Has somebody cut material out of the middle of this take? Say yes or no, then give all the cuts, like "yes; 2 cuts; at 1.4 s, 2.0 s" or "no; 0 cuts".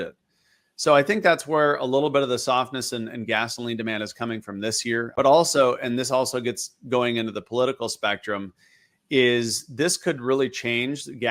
yes; 1 cut; at 5.1 s